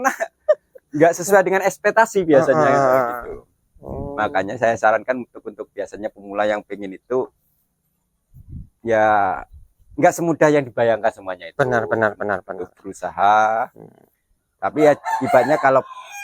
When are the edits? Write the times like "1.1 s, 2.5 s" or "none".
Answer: none